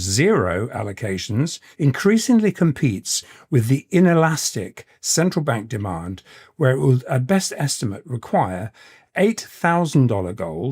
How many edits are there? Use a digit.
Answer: 1